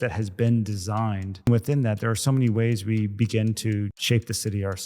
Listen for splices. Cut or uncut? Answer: cut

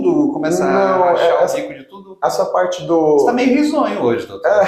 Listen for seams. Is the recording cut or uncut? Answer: uncut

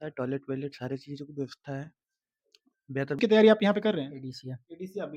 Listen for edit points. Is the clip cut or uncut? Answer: cut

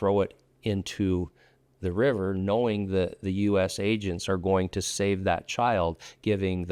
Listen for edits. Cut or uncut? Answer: uncut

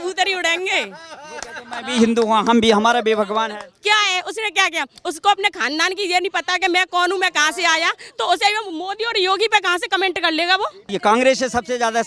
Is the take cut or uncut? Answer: cut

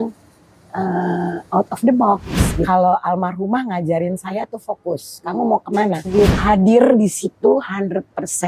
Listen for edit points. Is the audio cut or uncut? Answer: cut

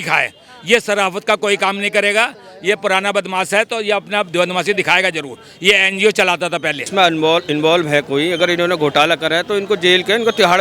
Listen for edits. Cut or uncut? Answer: cut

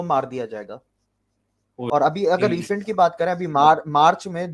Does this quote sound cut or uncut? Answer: cut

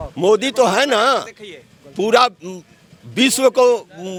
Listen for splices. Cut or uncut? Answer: uncut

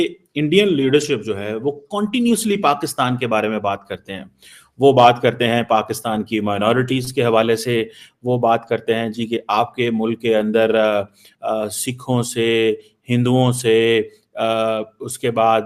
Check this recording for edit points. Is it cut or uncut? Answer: uncut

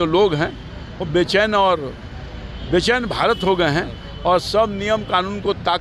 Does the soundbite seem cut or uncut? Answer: uncut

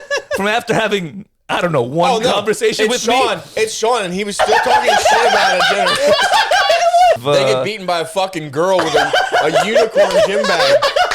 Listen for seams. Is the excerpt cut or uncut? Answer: cut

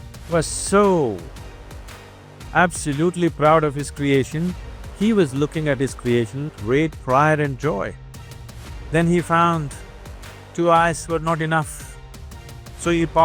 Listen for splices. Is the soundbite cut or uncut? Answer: uncut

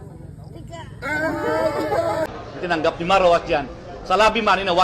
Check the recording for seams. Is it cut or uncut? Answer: cut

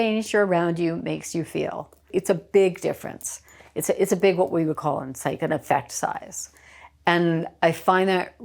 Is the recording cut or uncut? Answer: cut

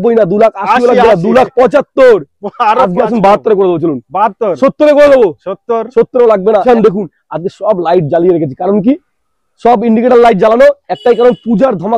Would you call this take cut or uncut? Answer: cut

